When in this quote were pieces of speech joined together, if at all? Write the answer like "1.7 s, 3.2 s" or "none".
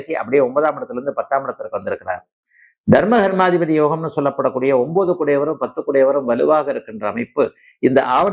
none